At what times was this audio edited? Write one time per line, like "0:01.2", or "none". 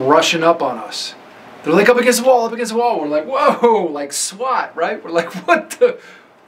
none